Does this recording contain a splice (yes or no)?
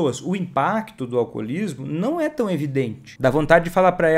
yes